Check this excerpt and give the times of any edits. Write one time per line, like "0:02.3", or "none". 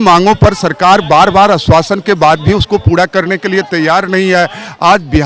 none